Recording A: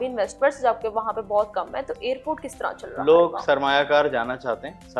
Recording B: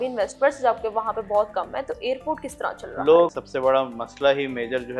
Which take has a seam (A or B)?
B